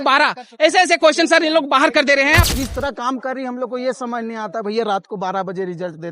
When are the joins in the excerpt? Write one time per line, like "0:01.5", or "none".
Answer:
0:02.4